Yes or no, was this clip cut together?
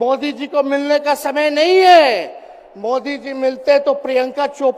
no